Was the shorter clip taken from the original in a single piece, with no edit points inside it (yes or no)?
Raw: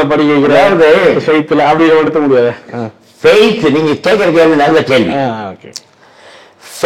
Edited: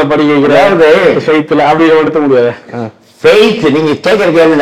yes